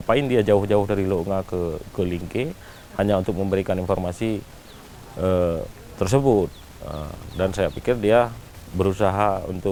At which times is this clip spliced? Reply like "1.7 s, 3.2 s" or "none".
none

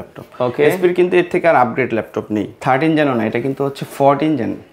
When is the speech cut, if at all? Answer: 2.5 s

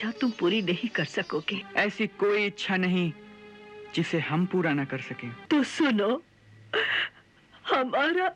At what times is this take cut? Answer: 1.6 s, 5.3 s

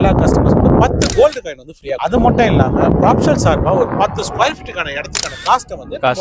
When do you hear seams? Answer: none

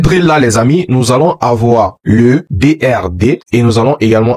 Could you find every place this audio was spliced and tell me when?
none

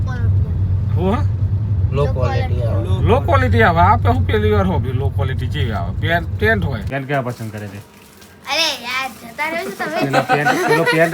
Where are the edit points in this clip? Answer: 6.9 s

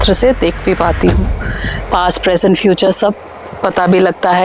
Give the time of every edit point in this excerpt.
none

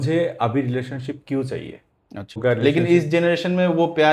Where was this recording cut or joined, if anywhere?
2.4 s

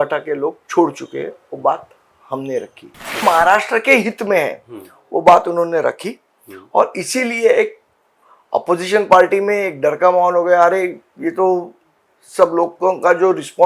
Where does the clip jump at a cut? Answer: 3.2 s

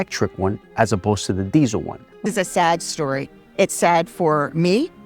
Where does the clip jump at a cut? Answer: 2.2 s

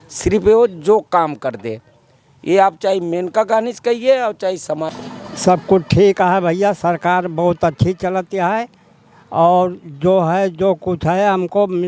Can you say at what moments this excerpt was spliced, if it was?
4.9 s

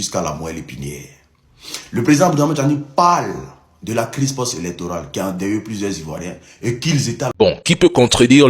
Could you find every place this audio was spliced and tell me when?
7.3 s

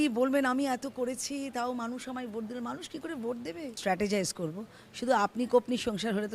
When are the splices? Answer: 3.7 s

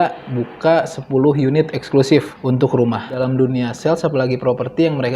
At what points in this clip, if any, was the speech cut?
2.3 s, 3.2 s

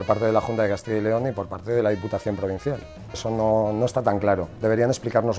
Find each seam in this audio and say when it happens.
3.2 s

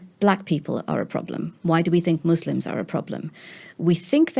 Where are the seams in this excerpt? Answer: none

